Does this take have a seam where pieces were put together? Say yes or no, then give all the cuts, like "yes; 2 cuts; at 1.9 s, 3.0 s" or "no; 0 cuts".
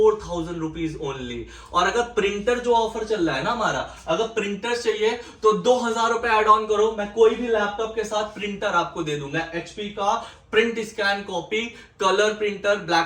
no; 0 cuts